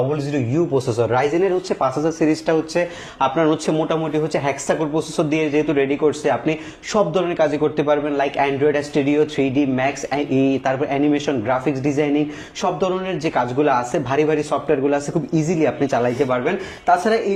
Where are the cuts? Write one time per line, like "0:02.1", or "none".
none